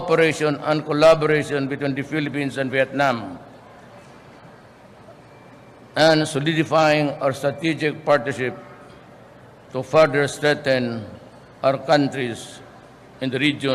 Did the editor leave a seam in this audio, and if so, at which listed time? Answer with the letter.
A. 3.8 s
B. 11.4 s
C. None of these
C